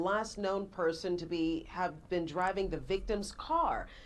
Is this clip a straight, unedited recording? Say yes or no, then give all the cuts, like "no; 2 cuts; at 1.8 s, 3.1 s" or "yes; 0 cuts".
yes; 0 cuts